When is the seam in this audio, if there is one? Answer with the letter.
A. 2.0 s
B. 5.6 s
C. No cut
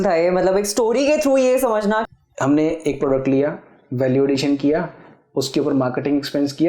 A